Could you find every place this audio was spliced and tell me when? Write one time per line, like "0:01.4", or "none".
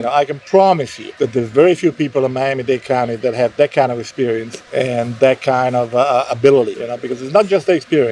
none